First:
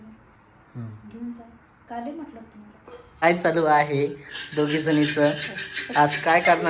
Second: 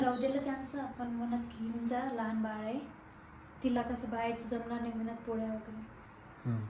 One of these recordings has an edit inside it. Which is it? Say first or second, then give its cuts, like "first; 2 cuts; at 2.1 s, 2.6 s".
first; 1 cut; at 3.2 s